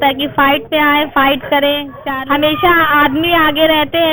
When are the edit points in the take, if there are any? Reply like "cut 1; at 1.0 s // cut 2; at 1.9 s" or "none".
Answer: cut 1; at 2.0 s